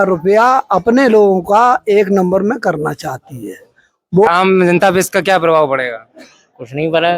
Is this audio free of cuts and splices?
no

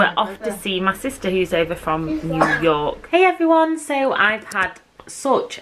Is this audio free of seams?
no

